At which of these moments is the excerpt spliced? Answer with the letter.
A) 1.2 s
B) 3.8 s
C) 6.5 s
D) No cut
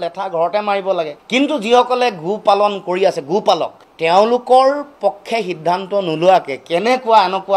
B